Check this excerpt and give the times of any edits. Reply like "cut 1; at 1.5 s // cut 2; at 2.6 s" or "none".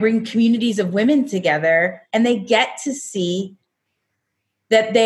none

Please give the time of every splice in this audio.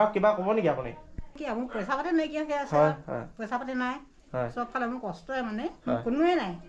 cut 1; at 1.3 s

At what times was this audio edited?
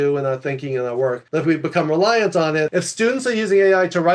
cut 1; at 1.2 s // cut 2; at 2.7 s

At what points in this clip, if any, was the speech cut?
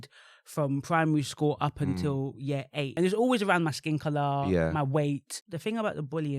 cut 1; at 2.9 s // cut 2; at 5.4 s

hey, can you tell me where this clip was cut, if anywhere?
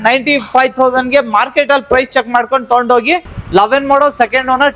cut 1; at 3.3 s

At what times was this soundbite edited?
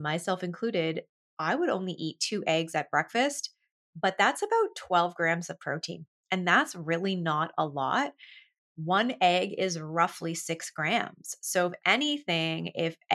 none

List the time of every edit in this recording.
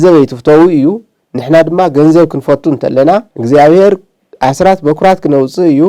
cut 1; at 3.3 s

